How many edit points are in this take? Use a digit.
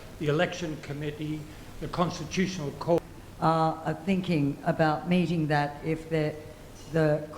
1